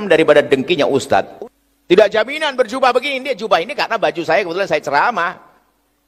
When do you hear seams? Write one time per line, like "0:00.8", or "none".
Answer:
0:01.3